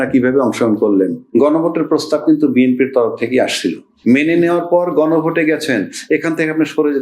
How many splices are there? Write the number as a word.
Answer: two